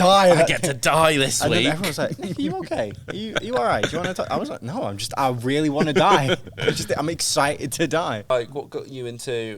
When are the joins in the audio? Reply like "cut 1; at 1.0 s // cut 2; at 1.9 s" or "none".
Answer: cut 1; at 8.3 s

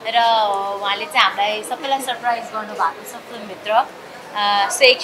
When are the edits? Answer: none

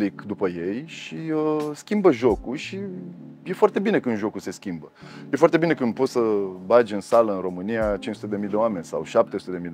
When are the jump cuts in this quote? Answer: none

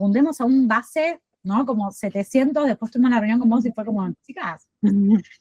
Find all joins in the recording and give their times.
none

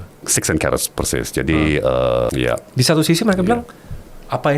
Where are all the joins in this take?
cut 1; at 2.3 s

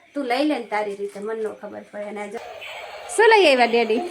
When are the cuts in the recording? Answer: cut 1; at 2.3 s

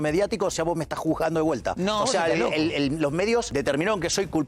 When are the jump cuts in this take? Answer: cut 1; at 1.7 s // cut 2; at 3.5 s

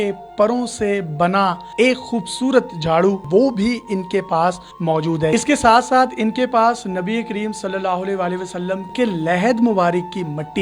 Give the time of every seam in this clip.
cut 1; at 3.2 s // cut 2; at 5.3 s // cut 3; at 8.9 s

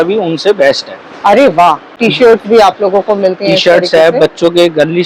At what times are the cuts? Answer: cut 1; at 2.0 s

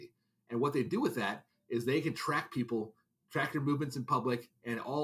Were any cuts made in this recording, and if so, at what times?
none

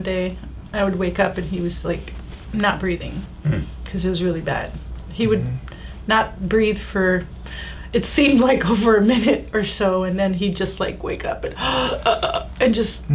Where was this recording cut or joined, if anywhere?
none

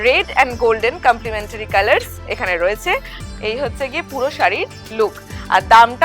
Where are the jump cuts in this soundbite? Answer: cut 1; at 3.1 s

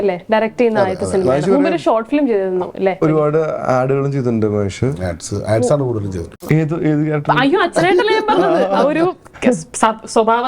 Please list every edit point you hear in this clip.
cut 1; at 3.0 s // cut 2; at 6.3 s

